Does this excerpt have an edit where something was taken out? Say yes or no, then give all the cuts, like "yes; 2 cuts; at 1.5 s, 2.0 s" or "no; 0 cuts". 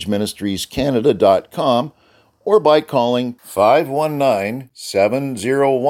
no; 0 cuts